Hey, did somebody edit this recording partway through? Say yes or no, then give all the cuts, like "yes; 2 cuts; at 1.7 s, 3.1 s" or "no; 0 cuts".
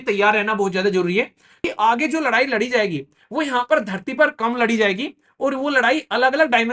yes; 1 cut; at 1.6 s